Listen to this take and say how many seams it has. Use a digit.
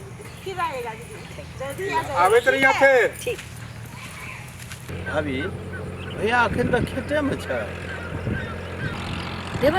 1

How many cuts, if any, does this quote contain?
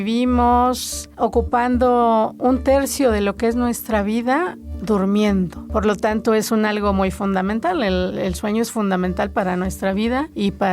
2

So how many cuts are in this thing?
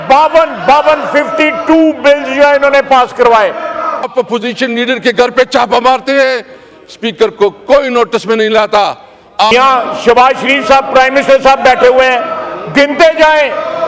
2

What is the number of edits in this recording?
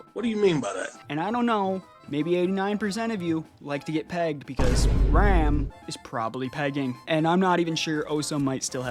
2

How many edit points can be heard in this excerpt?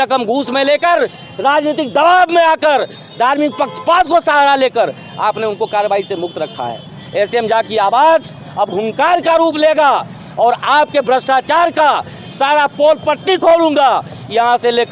0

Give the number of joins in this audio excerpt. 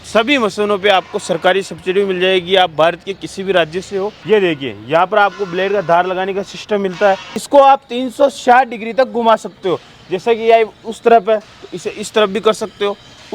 2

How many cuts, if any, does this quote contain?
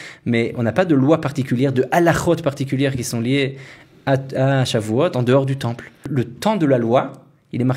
1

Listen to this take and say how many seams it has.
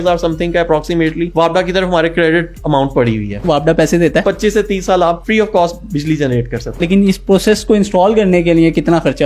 5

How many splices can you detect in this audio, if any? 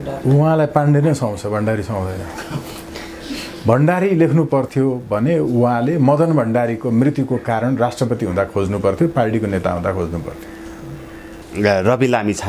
1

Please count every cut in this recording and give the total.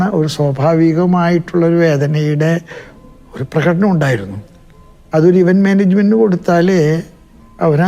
0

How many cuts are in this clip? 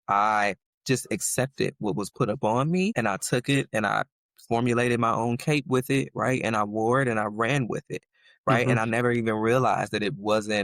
1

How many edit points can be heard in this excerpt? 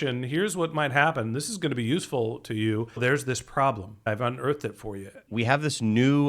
3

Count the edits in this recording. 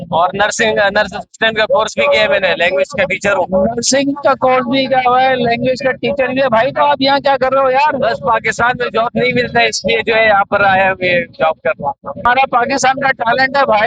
1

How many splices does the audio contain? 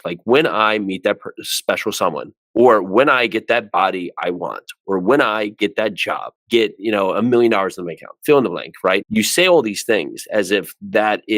1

